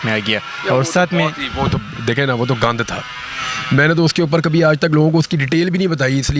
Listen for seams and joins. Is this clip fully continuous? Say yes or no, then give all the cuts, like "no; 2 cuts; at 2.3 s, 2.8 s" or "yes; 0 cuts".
yes; 0 cuts